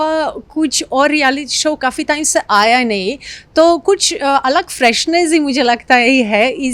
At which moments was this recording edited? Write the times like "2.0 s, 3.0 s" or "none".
none